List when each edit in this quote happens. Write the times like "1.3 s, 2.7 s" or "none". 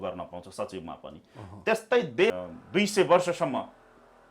2.3 s